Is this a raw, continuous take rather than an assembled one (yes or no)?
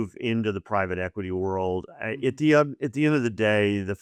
yes